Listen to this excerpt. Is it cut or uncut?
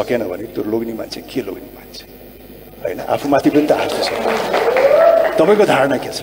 uncut